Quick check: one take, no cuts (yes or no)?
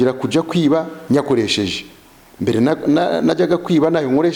yes